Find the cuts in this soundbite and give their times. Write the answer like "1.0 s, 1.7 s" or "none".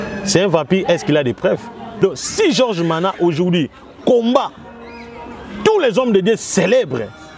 1.8 s